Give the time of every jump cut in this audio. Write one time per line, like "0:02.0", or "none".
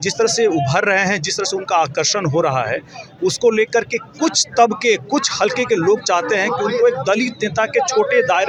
none